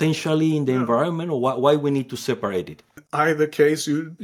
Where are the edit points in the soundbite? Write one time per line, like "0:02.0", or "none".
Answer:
0:03.0